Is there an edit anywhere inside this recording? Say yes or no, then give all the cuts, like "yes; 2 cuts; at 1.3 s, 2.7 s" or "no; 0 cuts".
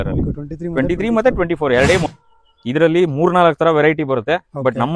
yes; 1 cut; at 2.1 s